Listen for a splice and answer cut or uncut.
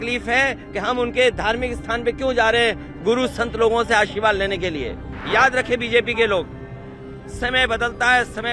cut